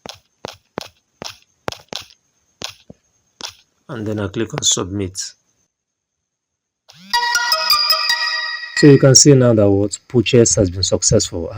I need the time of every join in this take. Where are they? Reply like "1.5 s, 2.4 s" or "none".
1.0 s